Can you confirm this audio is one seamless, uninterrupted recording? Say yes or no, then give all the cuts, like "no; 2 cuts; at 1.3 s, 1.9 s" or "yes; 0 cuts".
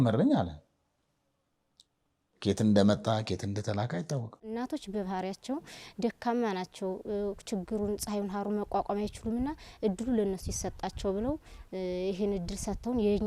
no; 1 cut; at 4.4 s